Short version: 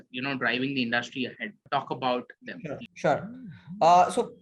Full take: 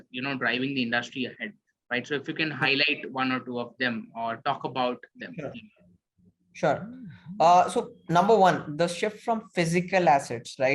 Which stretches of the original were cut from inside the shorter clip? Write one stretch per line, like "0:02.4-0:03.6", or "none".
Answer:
0:01.6-0:04.4
0:05.6-0:06.5